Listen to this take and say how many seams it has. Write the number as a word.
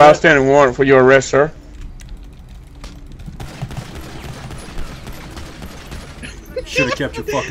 one